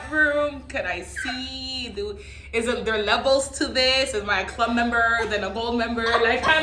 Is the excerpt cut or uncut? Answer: uncut